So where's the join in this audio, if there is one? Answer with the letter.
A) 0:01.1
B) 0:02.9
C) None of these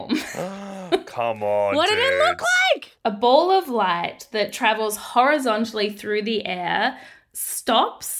B